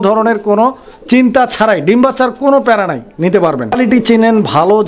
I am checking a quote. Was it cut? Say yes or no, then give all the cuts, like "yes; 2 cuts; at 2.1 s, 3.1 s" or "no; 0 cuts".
yes; 1 cut; at 3.8 s